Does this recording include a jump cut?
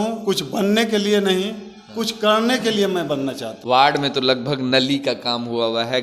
yes; 1 cut; at 3.5 s

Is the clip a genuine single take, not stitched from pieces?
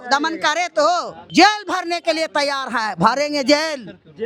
no; 1 cut; at 1.2 s

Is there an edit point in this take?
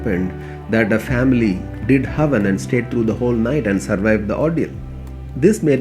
no; 0 cuts

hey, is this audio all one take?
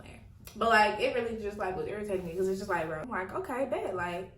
no; 1 cut; at 3.1 s

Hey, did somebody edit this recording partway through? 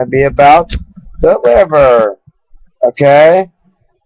yes; 1 cut; at 1.7 s

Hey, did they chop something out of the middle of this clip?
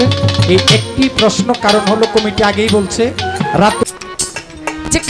yes; 1 cut; at 3.8 s

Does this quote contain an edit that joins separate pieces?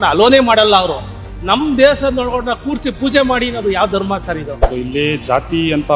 no; 0 cuts

